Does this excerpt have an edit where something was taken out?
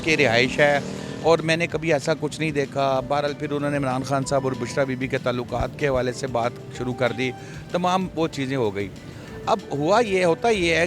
no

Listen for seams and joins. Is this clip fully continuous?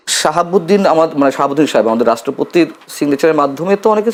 yes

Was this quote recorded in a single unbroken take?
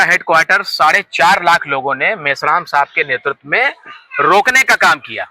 yes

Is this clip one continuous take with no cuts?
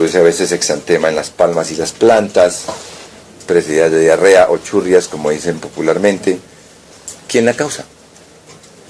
no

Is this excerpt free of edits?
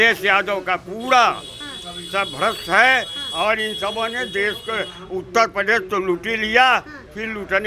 yes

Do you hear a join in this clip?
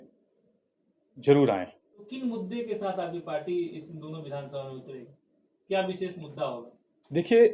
yes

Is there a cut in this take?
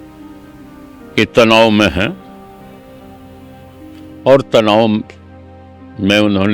no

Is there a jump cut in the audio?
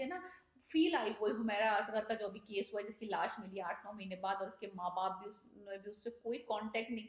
no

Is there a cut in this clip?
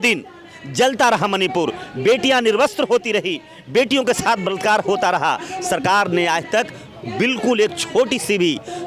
no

